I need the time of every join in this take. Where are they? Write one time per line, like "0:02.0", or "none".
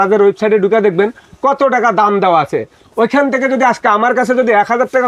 none

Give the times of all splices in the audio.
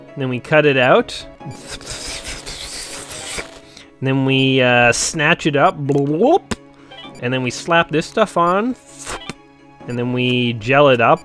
0:01.4

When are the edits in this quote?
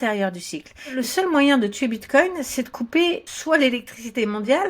0:01.0
0:03.3

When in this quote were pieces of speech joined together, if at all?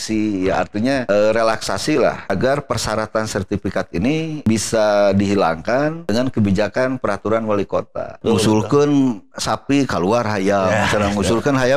0:01.0
0:02.2
0:04.4
0:06.0
0:08.2

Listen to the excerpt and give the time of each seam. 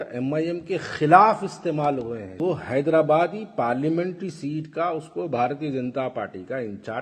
0:02.4

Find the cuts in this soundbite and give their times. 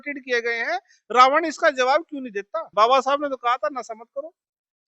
0:02.6

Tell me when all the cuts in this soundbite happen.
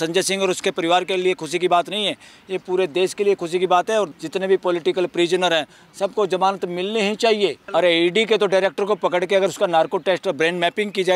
0:04.1
0:07.6

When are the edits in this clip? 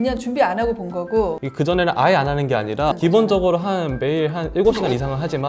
0:01.4
0:02.9

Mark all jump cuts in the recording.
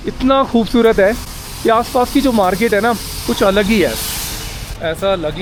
none

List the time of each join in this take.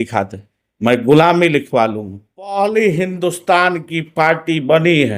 0:02.5

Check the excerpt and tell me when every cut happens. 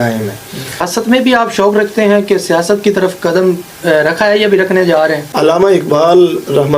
0:00.9
0:05.2

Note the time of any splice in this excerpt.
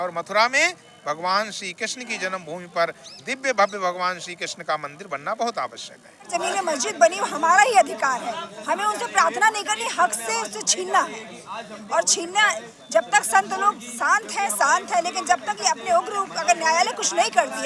0:06.3

